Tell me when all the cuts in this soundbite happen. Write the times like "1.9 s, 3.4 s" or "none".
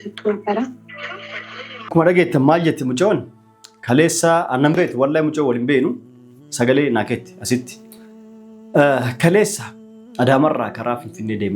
1.9 s